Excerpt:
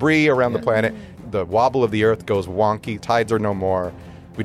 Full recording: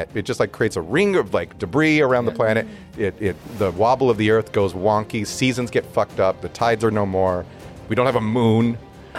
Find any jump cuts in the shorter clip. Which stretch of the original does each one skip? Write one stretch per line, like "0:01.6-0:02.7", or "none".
0:02.8-0:03.4
0:05.2-0:06.5